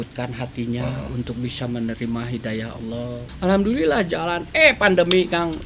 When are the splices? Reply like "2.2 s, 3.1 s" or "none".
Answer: 3.2 s